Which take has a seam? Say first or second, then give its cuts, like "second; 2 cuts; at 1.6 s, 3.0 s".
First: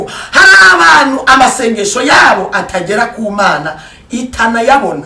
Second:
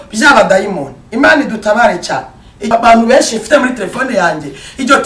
second; 1 cut; at 2.7 s